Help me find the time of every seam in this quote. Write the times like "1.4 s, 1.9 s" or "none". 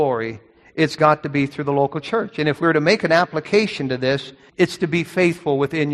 4.4 s